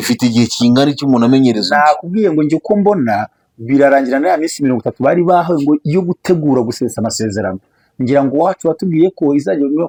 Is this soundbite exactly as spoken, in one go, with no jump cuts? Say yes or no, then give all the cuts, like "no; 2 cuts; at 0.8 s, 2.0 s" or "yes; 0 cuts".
yes; 0 cuts